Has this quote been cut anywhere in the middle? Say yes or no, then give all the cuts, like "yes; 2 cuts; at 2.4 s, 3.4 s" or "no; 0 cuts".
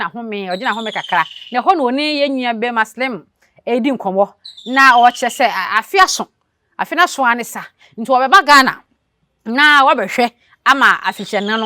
no; 0 cuts